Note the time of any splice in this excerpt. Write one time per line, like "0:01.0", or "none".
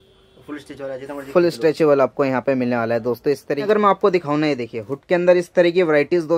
0:03.6

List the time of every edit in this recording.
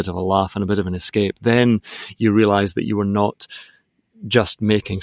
none

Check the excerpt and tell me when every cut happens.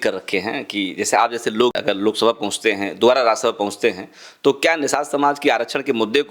0:01.7

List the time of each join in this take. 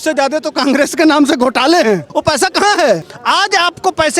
0:02.1
0:03.1

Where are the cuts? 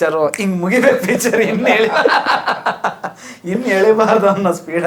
none

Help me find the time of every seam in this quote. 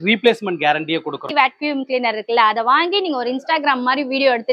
0:01.3

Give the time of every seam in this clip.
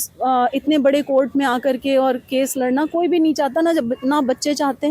none

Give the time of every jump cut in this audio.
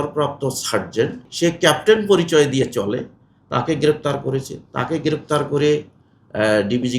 0:01.3

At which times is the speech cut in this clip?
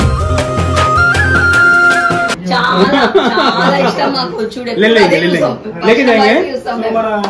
0:02.4

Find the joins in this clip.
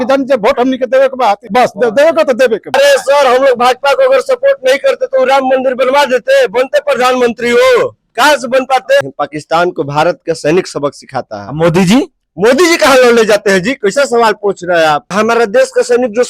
0:01.4
0:02.7
0:09.0
0:15.1

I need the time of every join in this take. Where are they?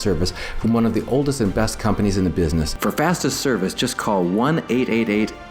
0:02.7

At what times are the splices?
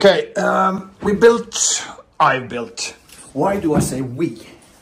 none

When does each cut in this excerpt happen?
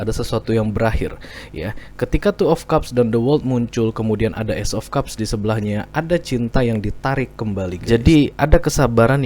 0:07.8

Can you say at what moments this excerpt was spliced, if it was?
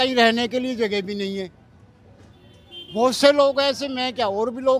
none

